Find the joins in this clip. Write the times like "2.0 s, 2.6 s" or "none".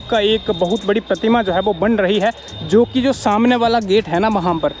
none